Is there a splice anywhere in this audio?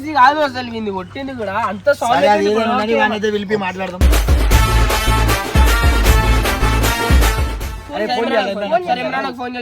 yes; 1 cut; at 7.8 s

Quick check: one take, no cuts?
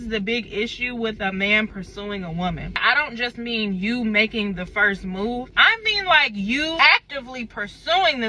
yes; 0 cuts

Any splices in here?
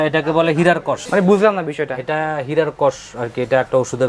no; 0 cuts

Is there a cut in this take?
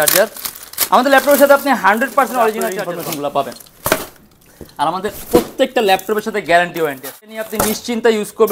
yes; 2 cuts; at 2.8 s, 7.4 s

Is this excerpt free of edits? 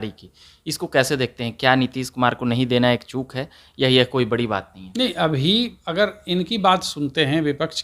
yes; 0 cuts

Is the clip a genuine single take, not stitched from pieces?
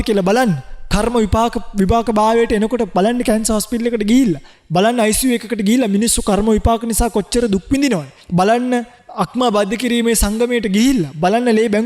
no; 3 cuts; at 4.5 s, 8.2 s, 9.0 s

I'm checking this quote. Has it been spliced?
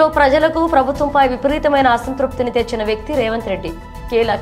no; 0 cuts

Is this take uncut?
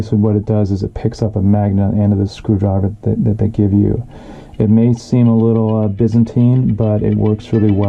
yes; 0 cuts

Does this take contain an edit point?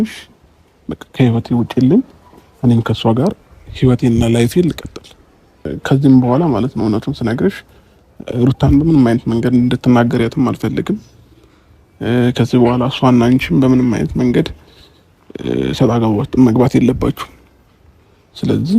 yes; 1 cut; at 5.7 s

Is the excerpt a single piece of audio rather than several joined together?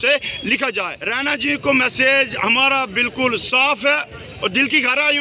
no; 1 cut; at 1.0 s

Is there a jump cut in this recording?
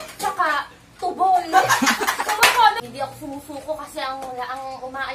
yes; 1 cut; at 2.8 s

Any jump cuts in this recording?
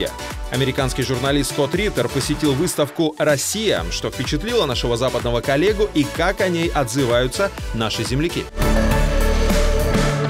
yes; 1 cut; at 8.5 s

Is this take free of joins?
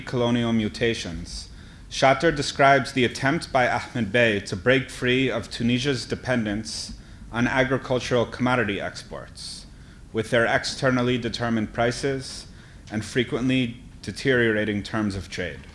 no; 1 cut; at 13.4 s

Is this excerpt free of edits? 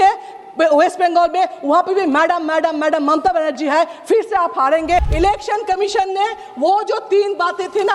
no; 1 cut; at 5.1 s

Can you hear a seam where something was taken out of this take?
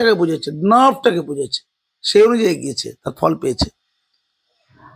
no; 0 cuts

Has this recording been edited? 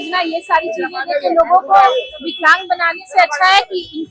no; 0 cuts

